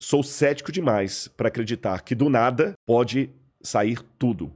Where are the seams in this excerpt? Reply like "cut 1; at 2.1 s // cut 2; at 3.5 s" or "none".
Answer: cut 1; at 2.8 s

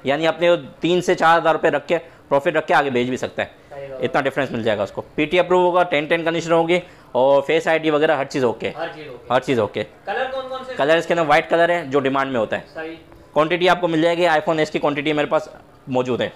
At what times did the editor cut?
none

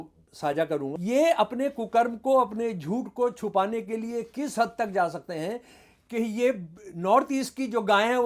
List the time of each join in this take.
cut 1; at 0.9 s

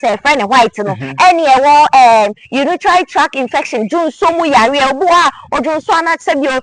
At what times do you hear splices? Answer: none

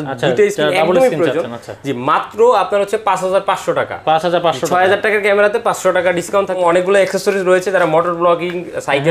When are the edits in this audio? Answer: cut 1; at 6.6 s

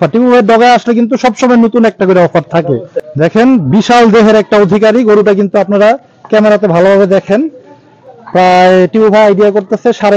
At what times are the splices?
cut 1; at 3.0 s

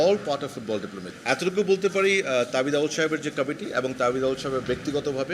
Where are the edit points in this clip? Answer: cut 1; at 1.1 s

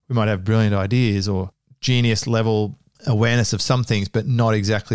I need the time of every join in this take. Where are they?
none

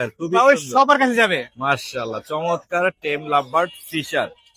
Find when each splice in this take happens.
none

